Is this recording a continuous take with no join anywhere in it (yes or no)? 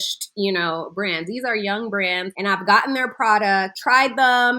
no